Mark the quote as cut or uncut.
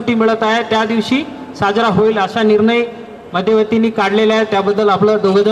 uncut